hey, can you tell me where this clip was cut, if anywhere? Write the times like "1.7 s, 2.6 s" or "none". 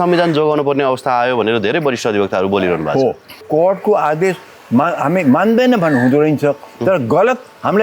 3.4 s